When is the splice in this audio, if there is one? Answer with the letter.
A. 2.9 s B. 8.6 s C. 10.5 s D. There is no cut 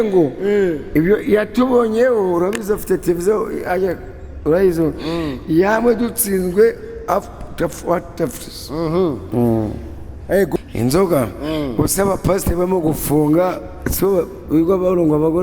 C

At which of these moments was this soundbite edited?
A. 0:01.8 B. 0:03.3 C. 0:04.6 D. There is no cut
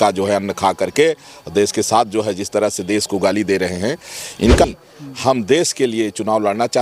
C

